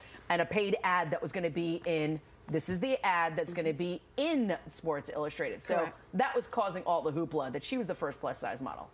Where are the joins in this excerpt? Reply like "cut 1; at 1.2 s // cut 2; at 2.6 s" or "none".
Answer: cut 1; at 3.2 s